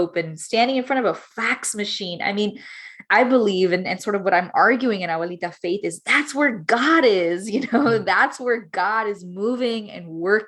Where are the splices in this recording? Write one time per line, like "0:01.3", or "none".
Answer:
none